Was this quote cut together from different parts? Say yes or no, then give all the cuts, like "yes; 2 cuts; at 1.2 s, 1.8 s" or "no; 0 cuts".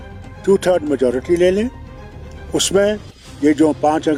no; 0 cuts